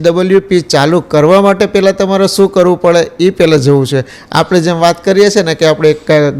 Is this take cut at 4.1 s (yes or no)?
no